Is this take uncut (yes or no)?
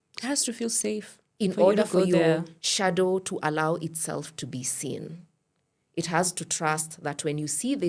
yes